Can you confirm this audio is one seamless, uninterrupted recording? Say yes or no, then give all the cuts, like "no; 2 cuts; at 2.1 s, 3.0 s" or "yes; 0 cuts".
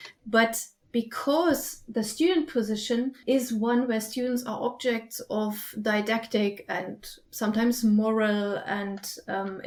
yes; 0 cuts